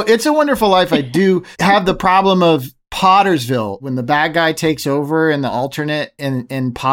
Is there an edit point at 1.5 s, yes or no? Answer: no